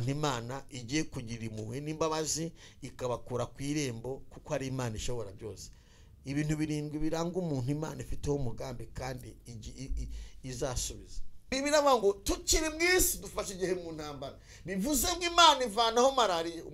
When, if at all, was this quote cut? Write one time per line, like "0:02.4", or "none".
0:11.4